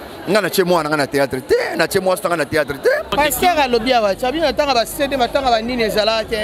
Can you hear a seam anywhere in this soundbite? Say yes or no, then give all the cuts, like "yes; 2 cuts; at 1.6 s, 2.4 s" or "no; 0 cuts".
yes; 1 cut; at 3.1 s